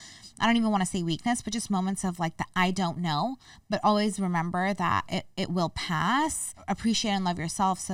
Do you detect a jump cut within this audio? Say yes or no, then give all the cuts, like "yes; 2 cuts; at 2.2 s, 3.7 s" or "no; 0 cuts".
yes; 1 cut; at 6.5 s